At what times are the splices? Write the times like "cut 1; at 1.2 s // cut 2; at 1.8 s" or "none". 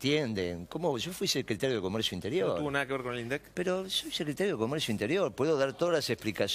none